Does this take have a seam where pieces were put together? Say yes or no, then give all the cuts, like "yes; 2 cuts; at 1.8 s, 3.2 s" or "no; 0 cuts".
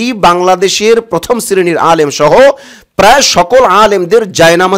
no; 0 cuts